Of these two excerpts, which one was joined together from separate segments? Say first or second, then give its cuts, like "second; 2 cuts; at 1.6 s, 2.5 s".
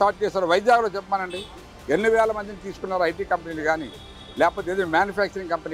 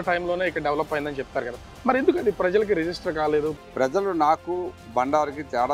second; 2 cuts; at 3.6 s, 4.8 s